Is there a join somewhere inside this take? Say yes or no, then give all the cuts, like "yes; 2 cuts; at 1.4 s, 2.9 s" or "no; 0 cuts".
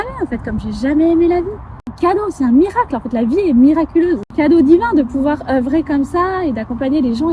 yes; 2 cuts; at 1.9 s, 4.3 s